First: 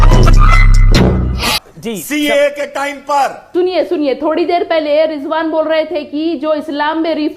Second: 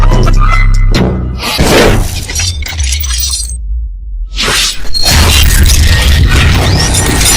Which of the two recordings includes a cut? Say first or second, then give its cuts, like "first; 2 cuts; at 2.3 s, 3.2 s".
first; 2 cuts; at 1.5 s, 3.4 s